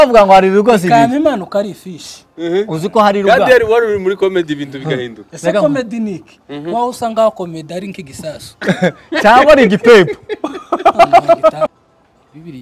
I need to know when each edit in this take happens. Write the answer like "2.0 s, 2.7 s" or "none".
11.7 s